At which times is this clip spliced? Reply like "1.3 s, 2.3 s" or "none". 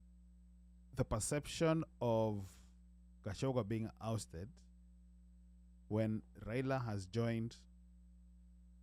none